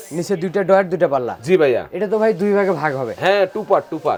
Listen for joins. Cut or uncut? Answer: uncut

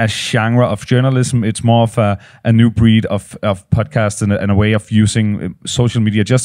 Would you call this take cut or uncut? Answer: uncut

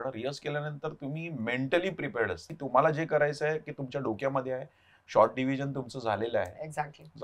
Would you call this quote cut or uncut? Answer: cut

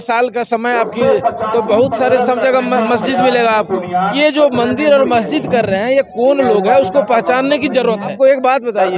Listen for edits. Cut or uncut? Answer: cut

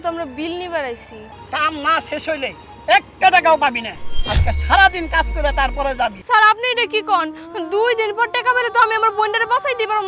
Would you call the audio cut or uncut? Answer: cut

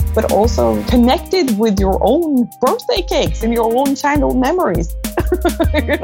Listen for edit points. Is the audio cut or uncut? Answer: cut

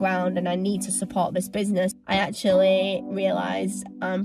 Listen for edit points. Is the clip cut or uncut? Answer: cut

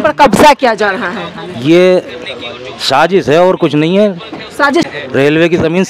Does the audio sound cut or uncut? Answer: cut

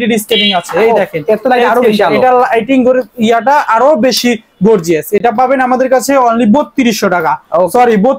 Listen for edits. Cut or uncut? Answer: uncut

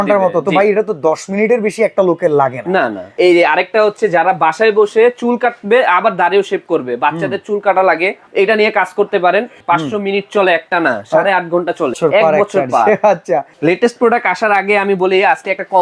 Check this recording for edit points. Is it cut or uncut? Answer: cut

